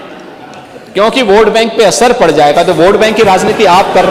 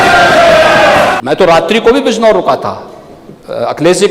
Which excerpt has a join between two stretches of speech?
second; 1 cut; at 1.2 s

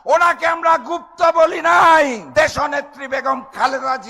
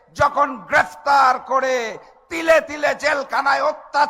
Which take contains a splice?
first; 1 cut; at 2.2 s

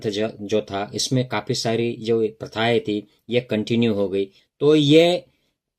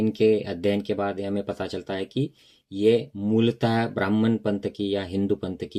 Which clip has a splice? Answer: first; 1 cut; at 4.4 s

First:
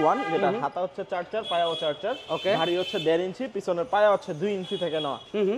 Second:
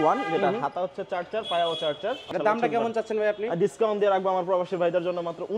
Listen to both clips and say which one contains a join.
second; 1 cut; at 2.3 s

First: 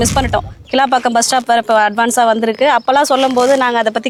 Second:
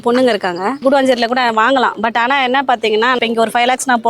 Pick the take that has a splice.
second; 2 cuts; at 0.8 s, 3.2 s

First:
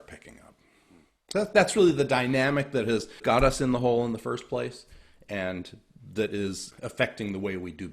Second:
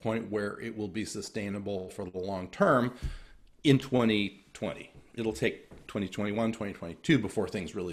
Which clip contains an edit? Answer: first; 2 cuts; at 3.2 s, 6.7 s

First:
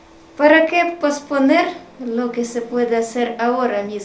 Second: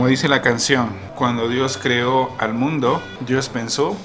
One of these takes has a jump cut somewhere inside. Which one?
second; 2 cuts; at 1.0 s, 3.1 s

